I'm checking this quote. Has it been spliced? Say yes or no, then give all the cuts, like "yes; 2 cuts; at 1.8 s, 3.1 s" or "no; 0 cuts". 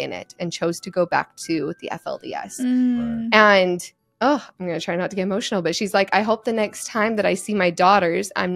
no; 0 cuts